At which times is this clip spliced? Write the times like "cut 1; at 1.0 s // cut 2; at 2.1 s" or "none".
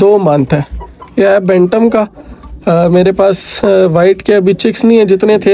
none